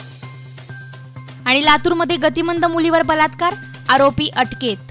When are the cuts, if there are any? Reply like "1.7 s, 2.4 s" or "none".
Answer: 1.0 s